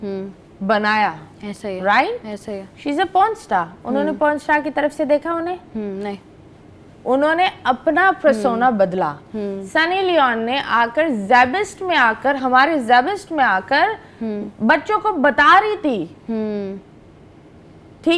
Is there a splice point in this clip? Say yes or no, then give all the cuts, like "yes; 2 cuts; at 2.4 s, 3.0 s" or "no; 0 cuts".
no; 0 cuts